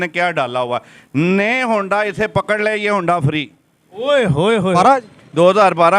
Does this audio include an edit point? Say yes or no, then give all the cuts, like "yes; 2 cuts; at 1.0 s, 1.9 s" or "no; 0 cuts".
yes; 1 cut; at 4.8 s